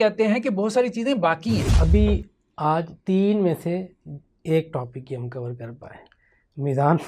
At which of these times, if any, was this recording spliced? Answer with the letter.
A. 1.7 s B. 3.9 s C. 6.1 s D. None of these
A